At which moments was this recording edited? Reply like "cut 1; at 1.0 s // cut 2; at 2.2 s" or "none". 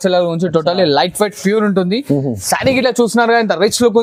none